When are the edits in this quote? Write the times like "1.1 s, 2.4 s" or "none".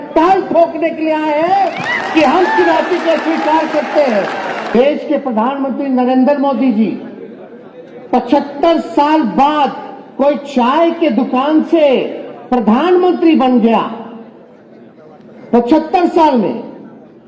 4.8 s